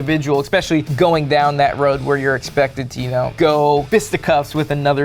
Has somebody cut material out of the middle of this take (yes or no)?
no